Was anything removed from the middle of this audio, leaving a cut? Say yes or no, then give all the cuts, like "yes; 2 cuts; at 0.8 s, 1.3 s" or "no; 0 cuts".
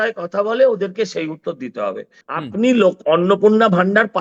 yes; 1 cut; at 2.1 s